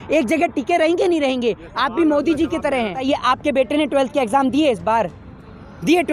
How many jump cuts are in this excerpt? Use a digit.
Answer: 1